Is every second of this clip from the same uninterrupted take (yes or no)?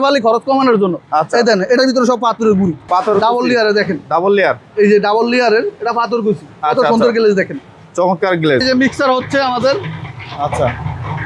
no